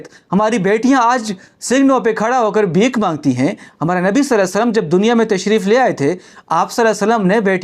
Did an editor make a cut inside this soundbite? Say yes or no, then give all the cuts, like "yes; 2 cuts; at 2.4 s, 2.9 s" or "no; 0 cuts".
no; 0 cuts